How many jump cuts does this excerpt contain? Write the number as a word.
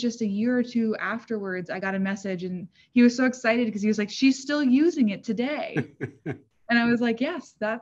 zero